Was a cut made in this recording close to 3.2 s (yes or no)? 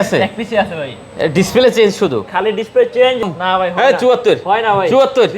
yes